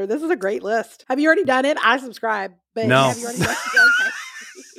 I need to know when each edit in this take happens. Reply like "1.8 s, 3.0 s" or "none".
1.1 s